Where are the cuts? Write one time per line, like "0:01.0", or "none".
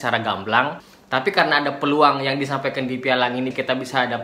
0:00.9